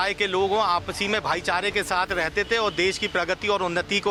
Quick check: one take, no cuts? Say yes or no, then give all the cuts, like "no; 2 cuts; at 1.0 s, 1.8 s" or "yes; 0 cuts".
yes; 0 cuts